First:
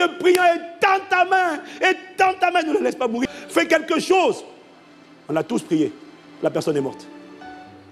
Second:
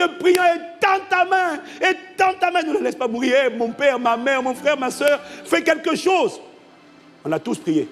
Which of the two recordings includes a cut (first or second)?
first